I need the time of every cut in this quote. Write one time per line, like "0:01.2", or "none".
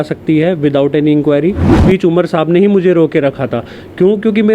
0:01.8

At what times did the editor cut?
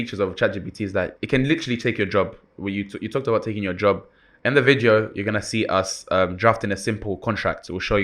0:01.2

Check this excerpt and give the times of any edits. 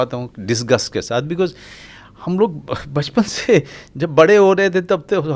none

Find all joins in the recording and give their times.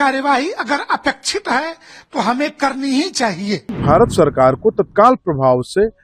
0:03.8

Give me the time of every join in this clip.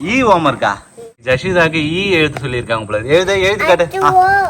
0:01.2

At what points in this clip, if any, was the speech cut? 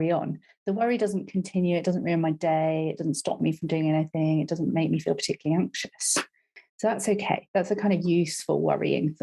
none

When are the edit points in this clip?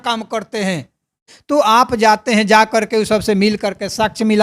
0:01.3

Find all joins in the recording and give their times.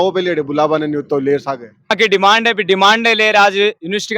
0:01.9

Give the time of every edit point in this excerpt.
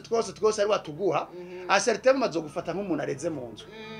none

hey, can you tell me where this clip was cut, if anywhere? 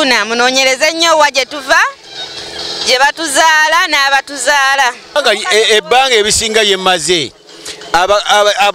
0:05.1

